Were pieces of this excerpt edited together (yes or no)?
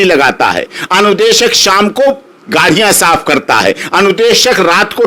no